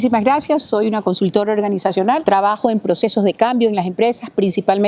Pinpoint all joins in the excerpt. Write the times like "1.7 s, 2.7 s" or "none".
2.2 s